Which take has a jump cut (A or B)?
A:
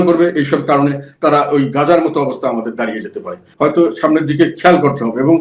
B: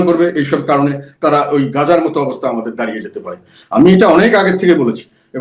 A